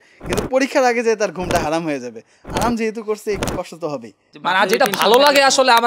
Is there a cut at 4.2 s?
yes; 1 cut; at 4.2 s

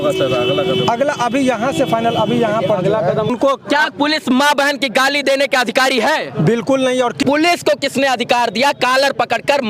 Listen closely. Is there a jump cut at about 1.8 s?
no; 2 cuts; at 3.3 s, 7.2 s

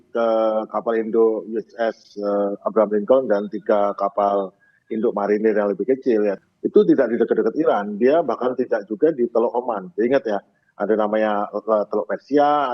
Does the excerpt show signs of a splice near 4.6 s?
no; 1 cut; at 6.4 s

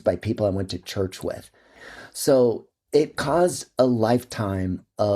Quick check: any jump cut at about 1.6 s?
yes; 1 cut; at 1.6 s

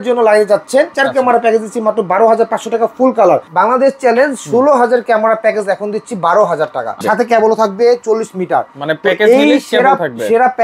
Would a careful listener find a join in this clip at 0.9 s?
yes; 3 cuts; at 0.9 s, 3.5 s, 7.0 s

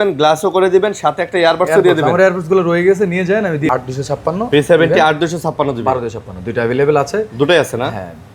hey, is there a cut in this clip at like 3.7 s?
yes; 1 cut; at 3.7 s

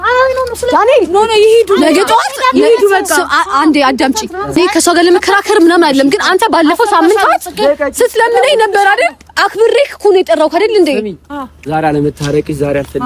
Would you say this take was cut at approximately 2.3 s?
no; 1 cut; at 4.6 s

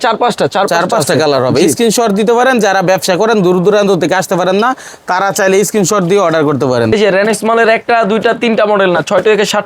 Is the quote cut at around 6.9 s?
yes; 1 cut; at 6.9 s

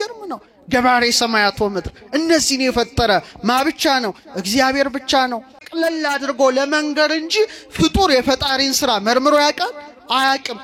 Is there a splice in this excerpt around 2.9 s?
no; 1 cut; at 5.6 s

